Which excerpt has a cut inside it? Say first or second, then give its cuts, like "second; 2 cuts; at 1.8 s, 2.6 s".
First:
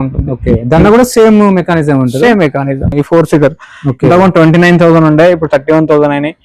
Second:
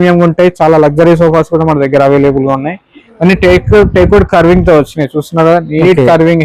first; 1 cut; at 2.9 s